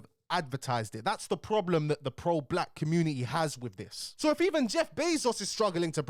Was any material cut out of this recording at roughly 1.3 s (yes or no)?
no